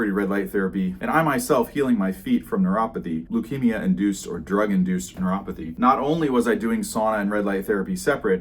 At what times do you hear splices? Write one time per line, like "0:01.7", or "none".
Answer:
0:01.0
0:03.2
0:05.6